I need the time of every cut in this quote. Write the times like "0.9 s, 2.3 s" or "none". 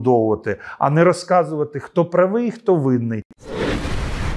3.3 s